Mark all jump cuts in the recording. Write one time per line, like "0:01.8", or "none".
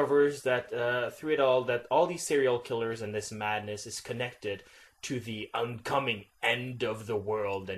none